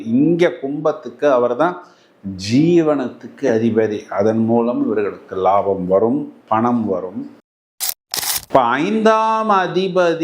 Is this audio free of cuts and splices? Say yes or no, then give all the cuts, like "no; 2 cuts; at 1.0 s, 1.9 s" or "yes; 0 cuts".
no; 1 cut; at 7.8 s